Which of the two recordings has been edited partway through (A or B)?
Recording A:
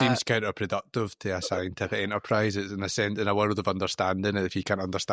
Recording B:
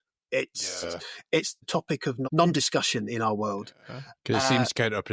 B